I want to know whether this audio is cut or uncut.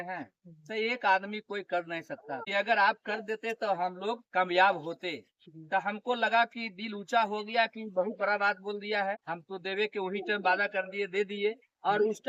cut